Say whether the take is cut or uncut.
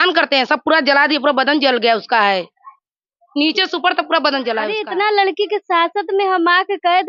cut